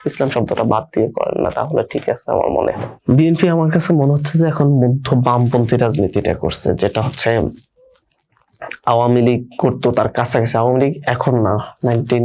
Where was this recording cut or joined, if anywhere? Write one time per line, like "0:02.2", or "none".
0:02.9